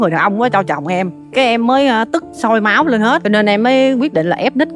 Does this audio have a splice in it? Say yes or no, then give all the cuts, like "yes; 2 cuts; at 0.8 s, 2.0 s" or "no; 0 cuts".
yes; 2 cuts; at 1.2 s, 3.2 s